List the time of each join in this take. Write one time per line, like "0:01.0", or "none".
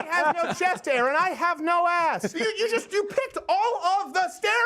0:02.3